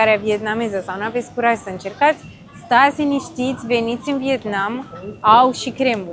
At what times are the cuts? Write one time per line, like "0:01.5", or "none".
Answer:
none